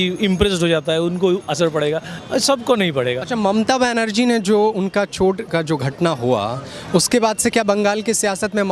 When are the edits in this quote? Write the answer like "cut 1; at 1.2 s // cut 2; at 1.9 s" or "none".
none